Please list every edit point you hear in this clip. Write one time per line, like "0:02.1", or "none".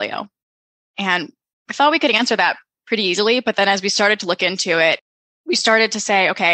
0:05.0